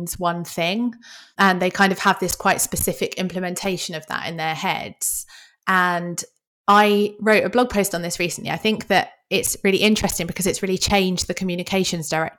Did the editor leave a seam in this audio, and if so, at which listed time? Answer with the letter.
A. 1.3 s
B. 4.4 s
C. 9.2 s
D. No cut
A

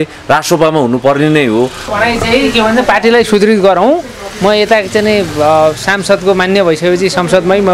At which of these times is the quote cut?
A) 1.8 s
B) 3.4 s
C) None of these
A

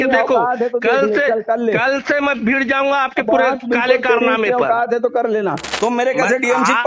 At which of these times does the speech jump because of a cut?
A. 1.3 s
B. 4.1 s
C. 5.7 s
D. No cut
C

